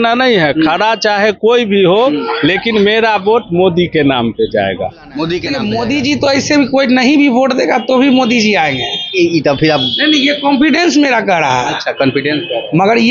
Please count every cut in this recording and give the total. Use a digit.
1